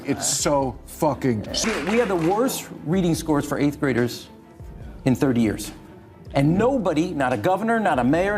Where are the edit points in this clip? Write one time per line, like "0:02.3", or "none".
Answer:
0:01.6